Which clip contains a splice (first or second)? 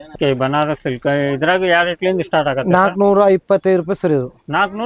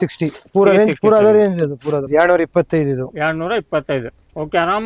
second